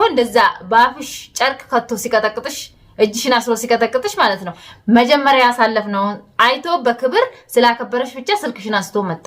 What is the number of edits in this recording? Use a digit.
1